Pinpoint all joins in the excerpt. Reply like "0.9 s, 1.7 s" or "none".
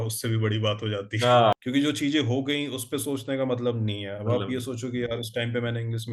1.5 s